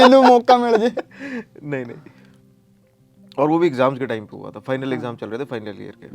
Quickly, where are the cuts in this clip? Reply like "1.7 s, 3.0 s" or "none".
none